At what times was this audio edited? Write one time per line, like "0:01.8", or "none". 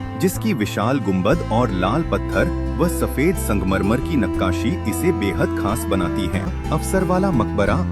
0:06.5